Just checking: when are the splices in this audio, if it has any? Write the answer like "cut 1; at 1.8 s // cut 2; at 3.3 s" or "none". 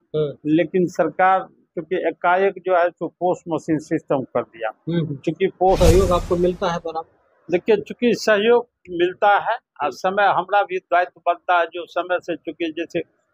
cut 1; at 5.8 s